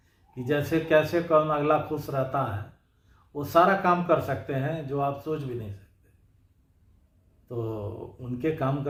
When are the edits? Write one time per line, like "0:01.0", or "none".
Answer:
none

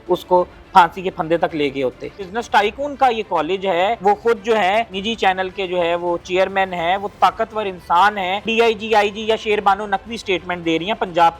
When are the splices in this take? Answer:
0:02.2
0:04.0
0:05.0
0:08.4

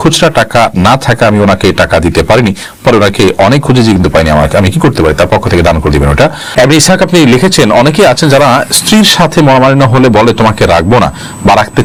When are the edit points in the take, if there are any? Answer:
none

